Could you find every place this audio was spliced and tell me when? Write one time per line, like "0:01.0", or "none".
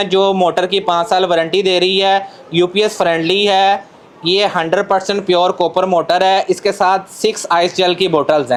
none